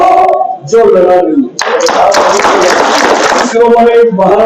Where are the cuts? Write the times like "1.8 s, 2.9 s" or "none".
3.5 s